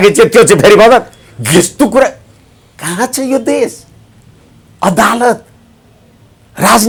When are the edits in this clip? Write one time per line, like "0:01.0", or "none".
none